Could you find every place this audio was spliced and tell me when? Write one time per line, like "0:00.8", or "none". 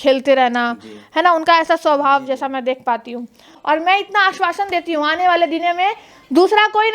0:03.5